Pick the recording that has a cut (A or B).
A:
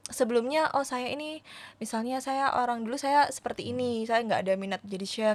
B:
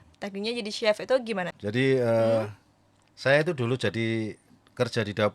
B